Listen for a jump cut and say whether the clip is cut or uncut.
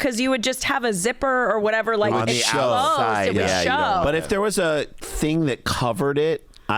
uncut